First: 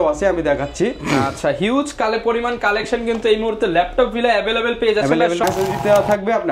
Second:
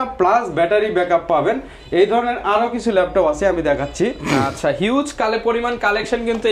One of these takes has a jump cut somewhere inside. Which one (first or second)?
first